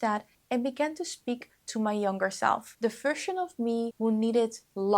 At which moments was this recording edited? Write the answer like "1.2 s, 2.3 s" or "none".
2.7 s, 3.9 s